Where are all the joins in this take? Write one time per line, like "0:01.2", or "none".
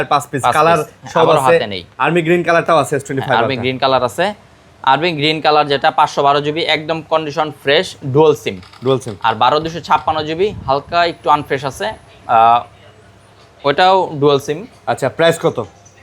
none